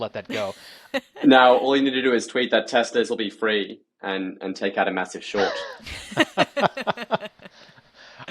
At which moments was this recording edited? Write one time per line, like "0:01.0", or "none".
0:00.9